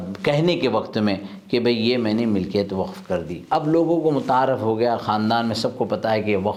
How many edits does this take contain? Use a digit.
0